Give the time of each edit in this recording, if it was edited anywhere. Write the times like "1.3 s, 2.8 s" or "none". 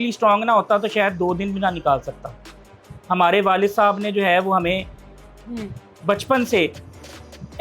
none